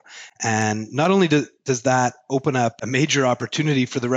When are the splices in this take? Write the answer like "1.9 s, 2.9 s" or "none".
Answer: 2.8 s